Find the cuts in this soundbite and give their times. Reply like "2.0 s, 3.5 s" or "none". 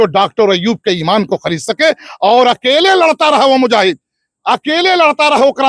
none